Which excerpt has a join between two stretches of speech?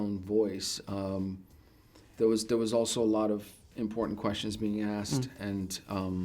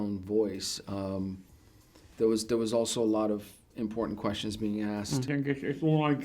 second; 1 cut; at 5.3 s

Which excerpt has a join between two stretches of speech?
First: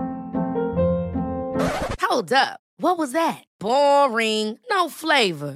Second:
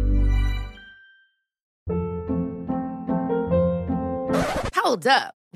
second; 1 cut; at 1.7 s

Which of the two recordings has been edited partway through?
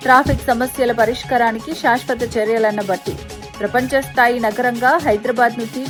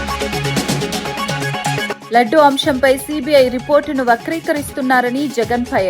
second; 1 cut; at 2.0 s

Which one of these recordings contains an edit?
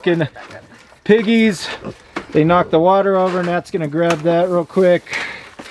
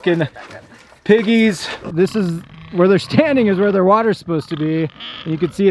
second; 1 cut; at 1.8 s

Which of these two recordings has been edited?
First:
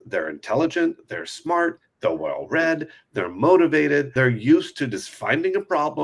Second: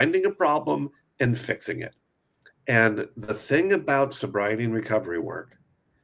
first; 1 cut; at 4.1 s

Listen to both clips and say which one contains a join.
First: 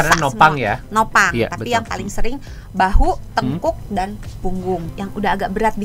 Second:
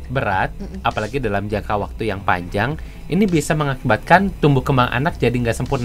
first; 1 cut; at 4.9 s

